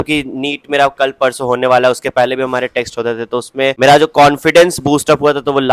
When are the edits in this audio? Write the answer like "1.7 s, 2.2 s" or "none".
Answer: 3.8 s